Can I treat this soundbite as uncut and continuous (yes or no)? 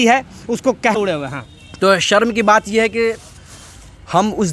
no